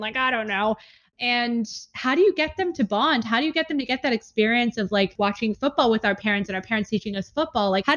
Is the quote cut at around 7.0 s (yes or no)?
no